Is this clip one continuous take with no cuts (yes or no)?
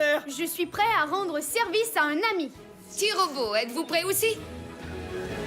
no